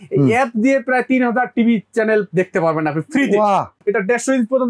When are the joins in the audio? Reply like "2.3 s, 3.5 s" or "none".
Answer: 3.7 s